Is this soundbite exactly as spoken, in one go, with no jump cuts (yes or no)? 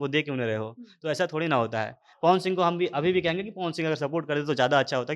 yes